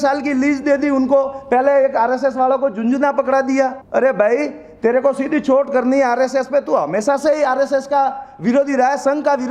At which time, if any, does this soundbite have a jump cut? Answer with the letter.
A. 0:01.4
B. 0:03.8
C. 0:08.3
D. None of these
B